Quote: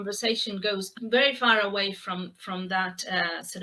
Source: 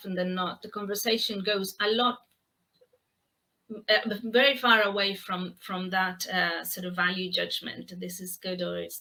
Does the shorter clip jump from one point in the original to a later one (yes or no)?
yes